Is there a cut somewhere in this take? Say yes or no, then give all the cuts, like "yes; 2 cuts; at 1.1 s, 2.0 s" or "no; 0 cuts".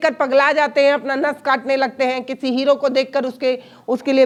no; 0 cuts